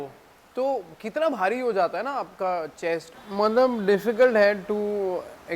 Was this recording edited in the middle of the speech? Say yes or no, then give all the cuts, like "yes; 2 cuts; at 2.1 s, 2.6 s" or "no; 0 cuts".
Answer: yes; 1 cut; at 3.1 s